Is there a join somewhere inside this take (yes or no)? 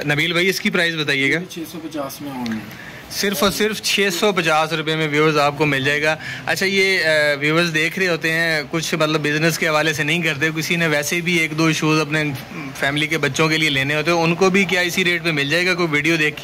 no